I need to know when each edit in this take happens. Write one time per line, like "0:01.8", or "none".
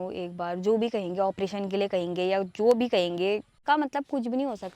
0:03.5